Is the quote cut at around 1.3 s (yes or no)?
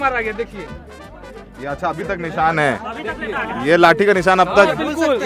no